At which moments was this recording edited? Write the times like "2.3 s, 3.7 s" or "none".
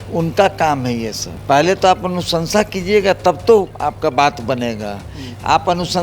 1.2 s, 3.7 s